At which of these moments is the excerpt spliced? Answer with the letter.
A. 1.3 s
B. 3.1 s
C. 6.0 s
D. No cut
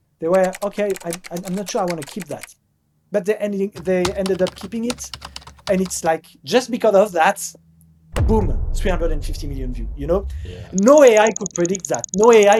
D